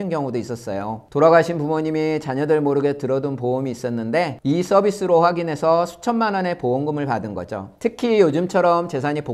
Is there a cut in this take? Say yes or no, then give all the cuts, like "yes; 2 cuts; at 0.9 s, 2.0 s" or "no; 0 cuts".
no; 0 cuts